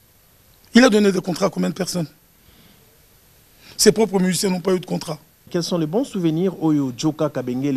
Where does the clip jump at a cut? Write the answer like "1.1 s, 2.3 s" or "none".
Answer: 5.5 s